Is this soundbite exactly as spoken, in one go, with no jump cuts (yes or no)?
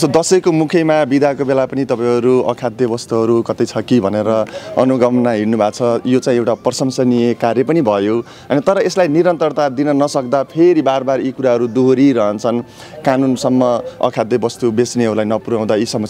yes